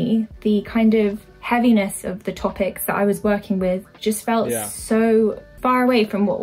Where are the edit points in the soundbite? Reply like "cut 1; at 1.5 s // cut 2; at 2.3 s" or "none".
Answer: cut 1; at 3.9 s // cut 2; at 5.5 s